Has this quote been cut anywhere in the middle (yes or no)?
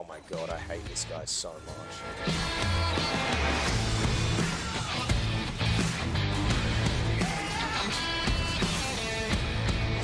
no